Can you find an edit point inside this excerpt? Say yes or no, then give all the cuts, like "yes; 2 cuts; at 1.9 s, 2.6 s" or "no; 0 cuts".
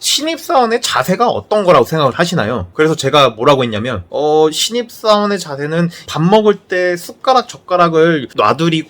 no; 0 cuts